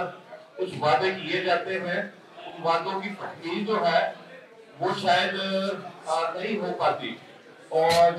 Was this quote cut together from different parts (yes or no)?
no